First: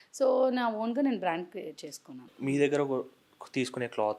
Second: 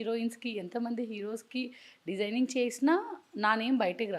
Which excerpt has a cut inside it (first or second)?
first